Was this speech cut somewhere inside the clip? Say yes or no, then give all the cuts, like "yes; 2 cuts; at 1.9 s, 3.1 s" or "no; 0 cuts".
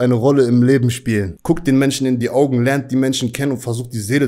yes; 1 cut; at 1.3 s